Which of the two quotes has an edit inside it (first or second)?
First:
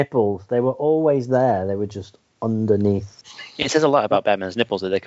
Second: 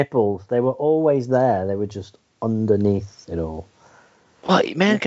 first